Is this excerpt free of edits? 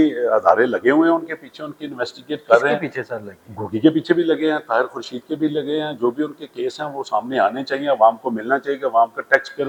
yes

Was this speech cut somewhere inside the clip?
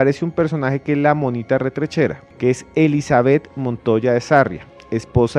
yes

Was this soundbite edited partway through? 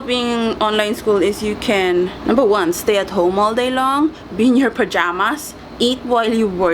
no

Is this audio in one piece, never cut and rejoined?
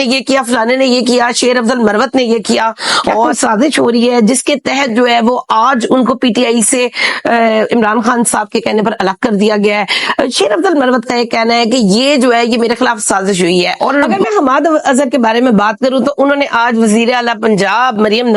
no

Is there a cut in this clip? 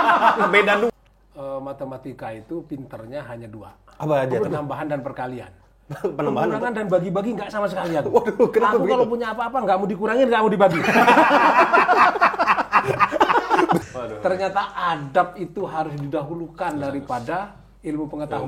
yes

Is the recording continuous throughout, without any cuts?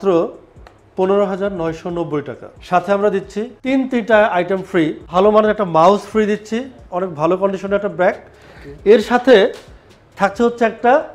no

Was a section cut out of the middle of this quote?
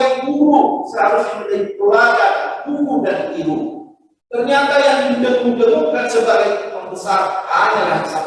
no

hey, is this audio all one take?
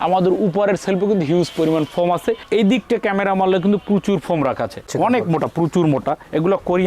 no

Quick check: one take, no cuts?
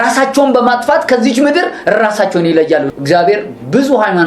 no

